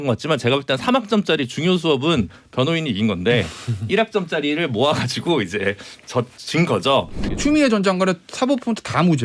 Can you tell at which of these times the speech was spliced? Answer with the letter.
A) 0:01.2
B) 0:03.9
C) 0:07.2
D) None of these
C